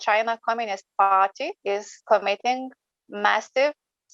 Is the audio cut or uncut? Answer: cut